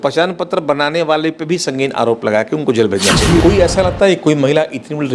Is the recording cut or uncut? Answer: cut